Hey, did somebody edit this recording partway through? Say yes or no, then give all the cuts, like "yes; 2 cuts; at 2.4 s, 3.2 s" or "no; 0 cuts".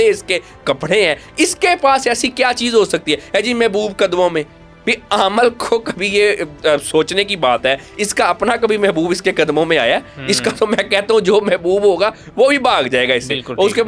no; 0 cuts